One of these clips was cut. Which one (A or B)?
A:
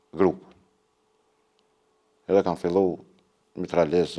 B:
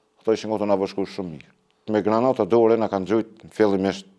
B